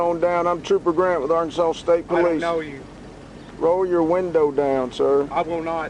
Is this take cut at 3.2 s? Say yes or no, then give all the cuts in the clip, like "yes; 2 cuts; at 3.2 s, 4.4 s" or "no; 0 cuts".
yes; 1 cut; at 3.2 s